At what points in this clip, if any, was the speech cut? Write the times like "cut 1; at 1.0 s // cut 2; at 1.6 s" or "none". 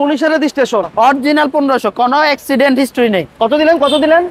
cut 1; at 0.9 s